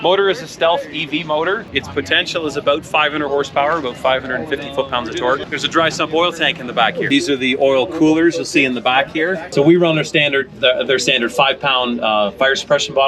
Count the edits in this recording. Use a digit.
4